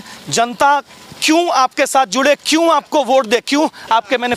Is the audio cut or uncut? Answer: uncut